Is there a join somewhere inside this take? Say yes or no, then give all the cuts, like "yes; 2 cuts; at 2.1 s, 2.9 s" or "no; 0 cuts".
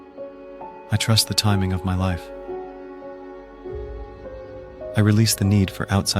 yes; 1 cut; at 0.9 s